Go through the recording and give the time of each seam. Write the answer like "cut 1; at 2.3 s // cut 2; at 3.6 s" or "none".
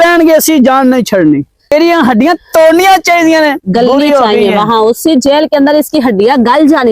cut 1; at 1.7 s